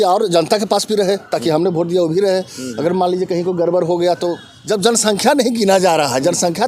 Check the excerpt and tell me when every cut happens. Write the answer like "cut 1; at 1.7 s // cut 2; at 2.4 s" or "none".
cut 1; at 4.5 s